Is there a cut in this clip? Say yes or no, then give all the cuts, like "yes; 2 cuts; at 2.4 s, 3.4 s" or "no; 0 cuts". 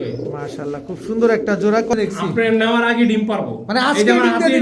yes; 1 cut; at 1.9 s